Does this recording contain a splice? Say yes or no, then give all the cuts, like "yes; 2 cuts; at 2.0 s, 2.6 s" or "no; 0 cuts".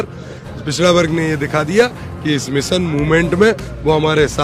no; 0 cuts